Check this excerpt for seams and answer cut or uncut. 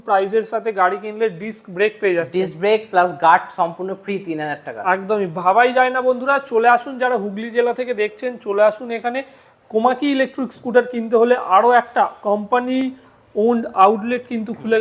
uncut